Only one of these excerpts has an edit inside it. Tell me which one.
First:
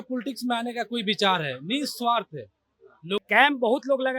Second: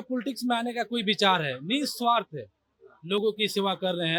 first; 1 cut; at 3.2 s

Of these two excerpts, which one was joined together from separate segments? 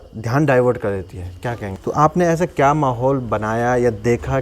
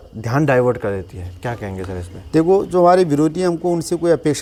first; 1 cut; at 1.7 s

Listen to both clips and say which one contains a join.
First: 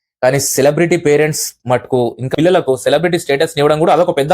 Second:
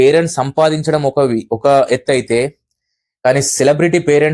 first; 1 cut; at 2.3 s

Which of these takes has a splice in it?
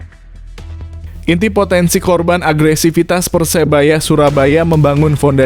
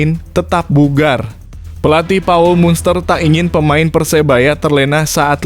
first; 1 cut; at 1.2 s

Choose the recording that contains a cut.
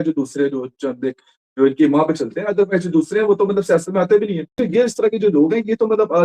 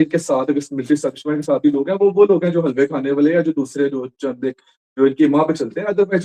first; 1 cut; at 4.5 s

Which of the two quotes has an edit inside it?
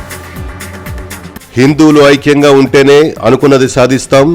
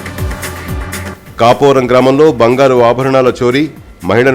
first; 1 cut; at 0.9 s

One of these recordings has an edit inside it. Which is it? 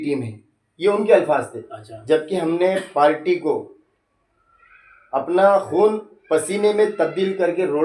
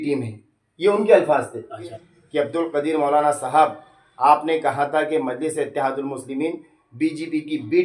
second; 1 cut; at 1.9 s

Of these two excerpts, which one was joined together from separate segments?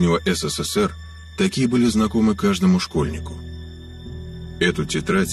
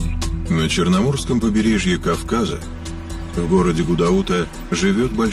first; 1 cut; at 1.9 s

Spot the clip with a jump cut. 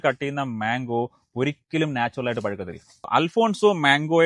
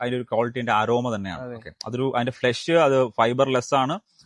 first; 1 cut; at 3.1 s

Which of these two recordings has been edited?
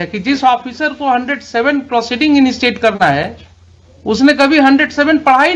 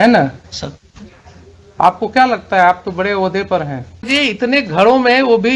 second; 1 cut; at 4.1 s

